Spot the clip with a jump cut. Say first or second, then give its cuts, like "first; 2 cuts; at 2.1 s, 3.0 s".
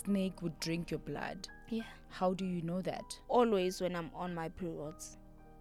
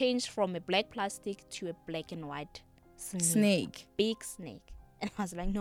first; 1 cut; at 3.1 s